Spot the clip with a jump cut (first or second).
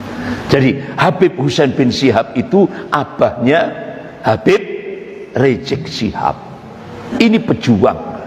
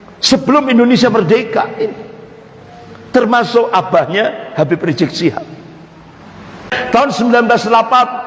second